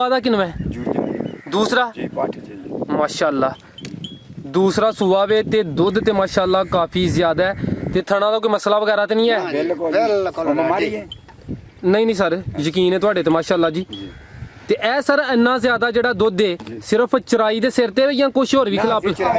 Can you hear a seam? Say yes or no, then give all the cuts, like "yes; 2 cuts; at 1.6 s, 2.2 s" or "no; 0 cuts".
no; 0 cuts